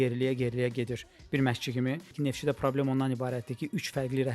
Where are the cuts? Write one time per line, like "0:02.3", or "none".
0:02.1